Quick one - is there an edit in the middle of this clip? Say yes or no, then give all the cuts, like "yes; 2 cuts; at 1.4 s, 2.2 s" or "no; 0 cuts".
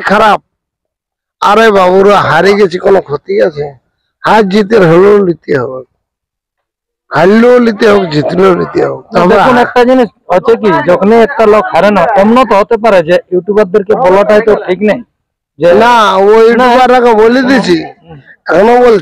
no; 0 cuts